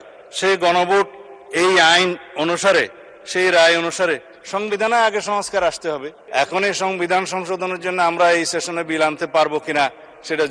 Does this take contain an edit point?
yes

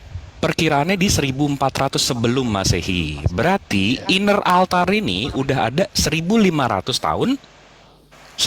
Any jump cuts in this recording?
no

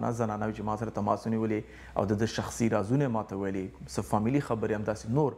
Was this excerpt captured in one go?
yes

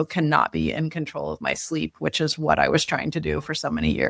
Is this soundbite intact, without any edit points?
yes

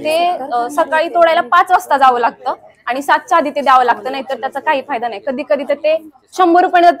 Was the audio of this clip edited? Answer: no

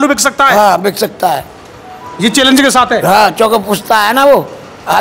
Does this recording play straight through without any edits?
yes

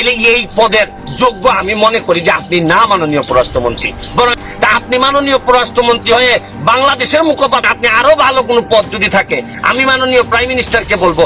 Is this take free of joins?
no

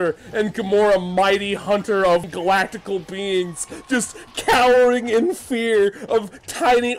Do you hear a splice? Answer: yes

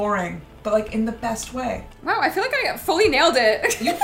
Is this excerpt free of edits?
no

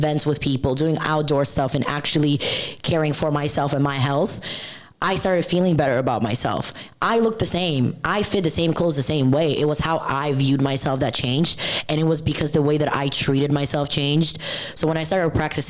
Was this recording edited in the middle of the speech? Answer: no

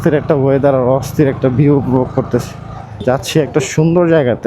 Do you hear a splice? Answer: yes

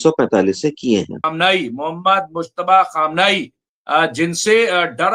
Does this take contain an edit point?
yes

